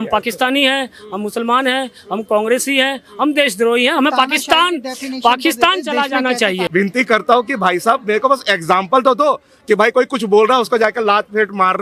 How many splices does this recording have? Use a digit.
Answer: 1